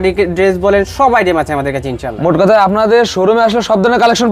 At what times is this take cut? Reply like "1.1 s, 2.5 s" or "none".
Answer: none